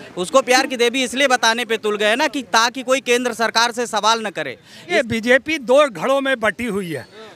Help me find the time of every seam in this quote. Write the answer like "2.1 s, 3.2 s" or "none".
4.9 s